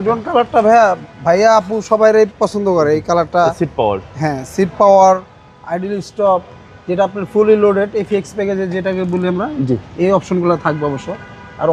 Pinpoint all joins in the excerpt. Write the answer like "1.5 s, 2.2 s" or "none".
none